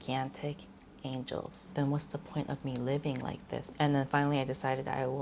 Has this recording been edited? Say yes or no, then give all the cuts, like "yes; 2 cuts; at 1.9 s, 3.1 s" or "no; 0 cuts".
yes; 2 cuts; at 1.6 s, 3.7 s